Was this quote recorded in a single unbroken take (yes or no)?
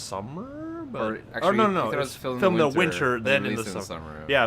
no